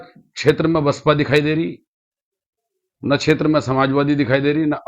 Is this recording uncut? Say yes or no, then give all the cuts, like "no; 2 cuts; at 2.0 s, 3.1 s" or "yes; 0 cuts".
yes; 0 cuts